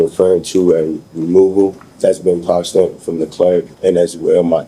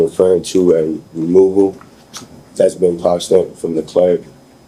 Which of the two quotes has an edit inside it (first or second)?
first